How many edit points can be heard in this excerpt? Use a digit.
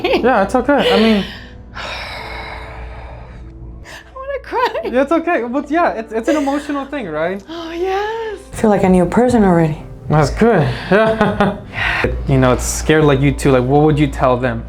3